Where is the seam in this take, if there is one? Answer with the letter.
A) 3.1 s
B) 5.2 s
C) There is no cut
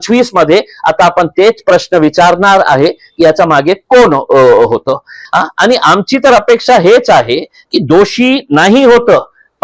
B